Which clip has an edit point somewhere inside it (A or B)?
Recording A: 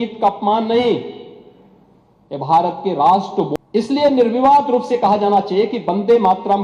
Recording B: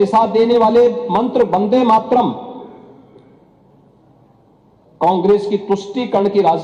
A